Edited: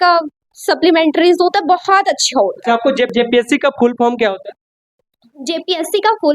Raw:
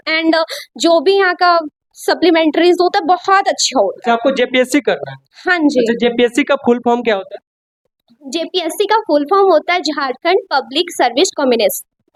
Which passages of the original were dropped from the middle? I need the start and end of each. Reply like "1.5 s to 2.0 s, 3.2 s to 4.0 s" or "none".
4.5 s to 6.0 s

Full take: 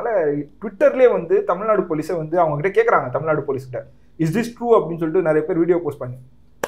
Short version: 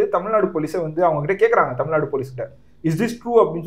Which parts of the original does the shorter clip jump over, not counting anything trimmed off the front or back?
none

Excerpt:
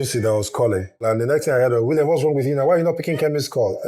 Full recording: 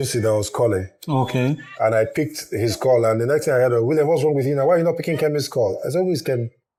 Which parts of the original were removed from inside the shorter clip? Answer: 1.0 s to 3.0 s

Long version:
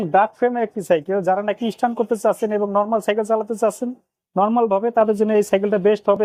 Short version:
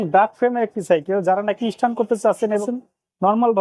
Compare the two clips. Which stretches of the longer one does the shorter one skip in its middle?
2.6 s to 3.8 s

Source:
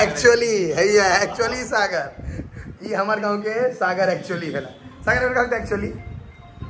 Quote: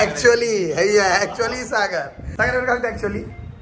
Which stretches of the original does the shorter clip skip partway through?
2.2 s to 4.9 s

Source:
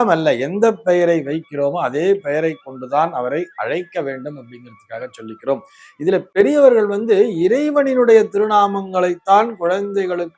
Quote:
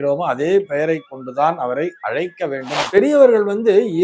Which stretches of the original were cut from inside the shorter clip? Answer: 4.4 s to 6.3 s

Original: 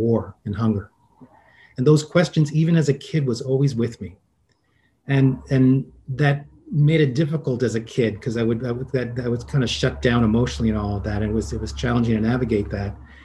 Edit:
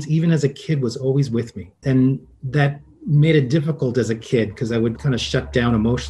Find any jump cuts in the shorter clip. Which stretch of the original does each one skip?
4.2 s to 5.4 s, 8.6 s to 9.5 s

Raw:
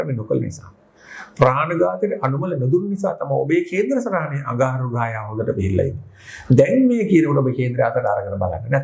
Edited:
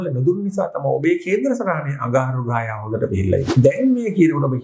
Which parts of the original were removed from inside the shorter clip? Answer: 5.9 s to 6.4 s

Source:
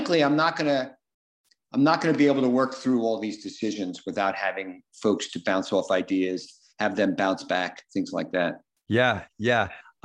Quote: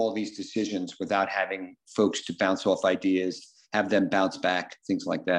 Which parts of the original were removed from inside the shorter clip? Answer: none

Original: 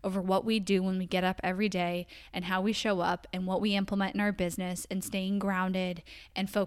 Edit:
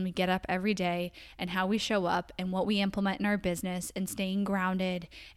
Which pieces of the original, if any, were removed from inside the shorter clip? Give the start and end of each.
none

